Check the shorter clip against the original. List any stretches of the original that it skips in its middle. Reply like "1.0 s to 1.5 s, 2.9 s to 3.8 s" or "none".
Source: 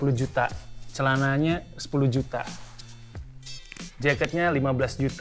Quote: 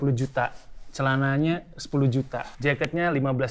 2.5 s to 3.9 s